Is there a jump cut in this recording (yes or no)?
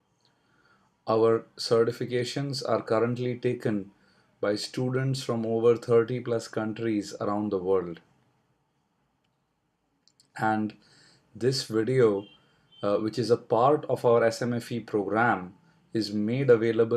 yes